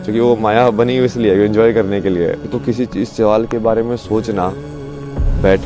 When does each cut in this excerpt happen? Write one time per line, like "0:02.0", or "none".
0:02.5